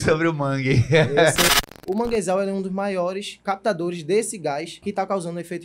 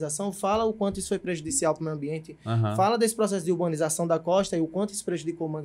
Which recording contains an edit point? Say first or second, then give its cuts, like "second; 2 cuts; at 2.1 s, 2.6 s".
first; 3 cuts; at 1.5 s, 3.3 s, 4.7 s